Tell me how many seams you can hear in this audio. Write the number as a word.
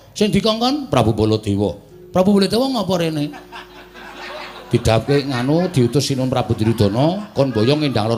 zero